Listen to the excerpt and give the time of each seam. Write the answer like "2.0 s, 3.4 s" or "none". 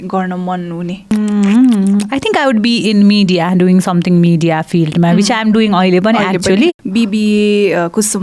1.1 s, 6.7 s